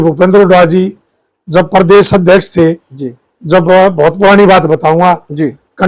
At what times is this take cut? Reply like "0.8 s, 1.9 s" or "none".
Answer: none

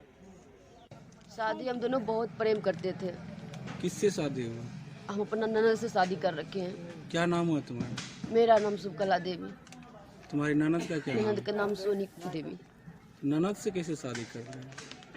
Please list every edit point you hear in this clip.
0.9 s

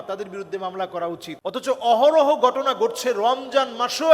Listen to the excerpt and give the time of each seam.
1.3 s

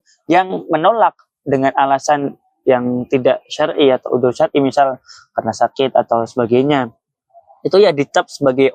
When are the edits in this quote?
none

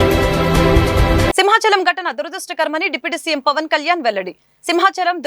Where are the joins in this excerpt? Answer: 1.3 s

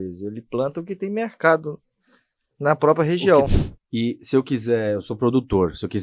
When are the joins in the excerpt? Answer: 3.5 s

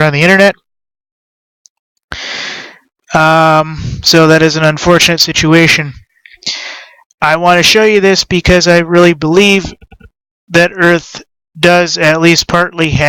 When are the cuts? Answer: 9.8 s

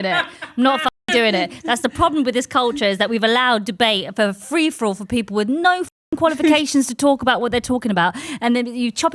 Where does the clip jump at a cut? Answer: none

